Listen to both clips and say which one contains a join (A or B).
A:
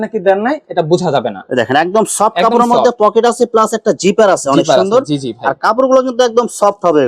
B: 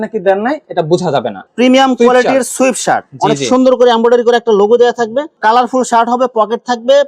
B